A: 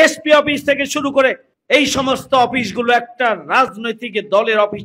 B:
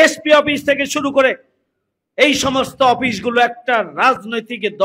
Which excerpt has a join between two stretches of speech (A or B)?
A